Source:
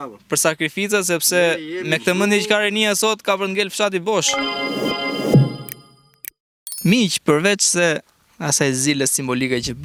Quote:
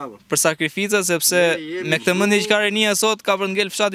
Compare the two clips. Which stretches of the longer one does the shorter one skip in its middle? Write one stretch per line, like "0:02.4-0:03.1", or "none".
none